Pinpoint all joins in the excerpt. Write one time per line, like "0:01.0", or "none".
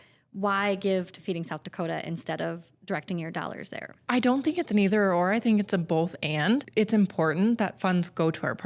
0:04.0
0:06.7

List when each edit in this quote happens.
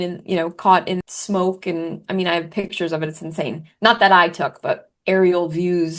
0:01.0

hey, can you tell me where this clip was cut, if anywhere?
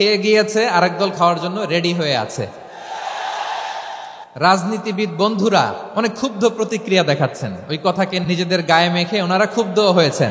0:04.2
0:05.8
0:08.2

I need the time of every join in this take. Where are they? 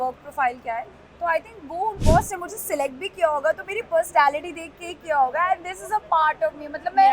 0:02.0

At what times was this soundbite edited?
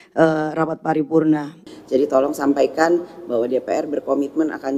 0:01.6

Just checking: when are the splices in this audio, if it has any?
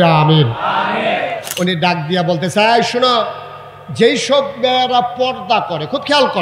0:01.4

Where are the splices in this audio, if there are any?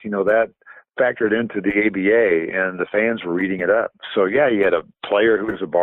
none

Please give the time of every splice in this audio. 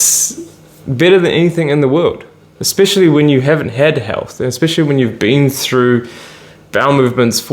none

